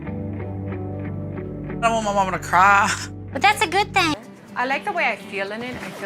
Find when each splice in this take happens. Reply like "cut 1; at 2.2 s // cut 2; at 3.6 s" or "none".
cut 1; at 4.2 s